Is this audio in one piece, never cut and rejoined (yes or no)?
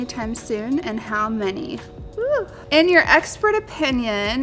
no